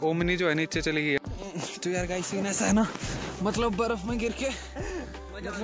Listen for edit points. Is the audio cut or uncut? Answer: cut